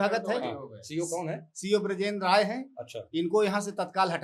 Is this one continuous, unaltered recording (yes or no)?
yes